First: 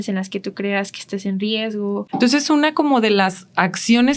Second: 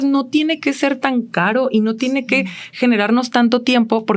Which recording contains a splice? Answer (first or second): first